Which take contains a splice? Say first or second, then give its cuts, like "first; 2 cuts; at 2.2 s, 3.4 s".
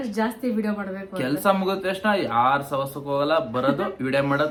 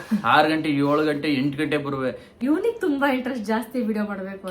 second; 1 cut; at 2.4 s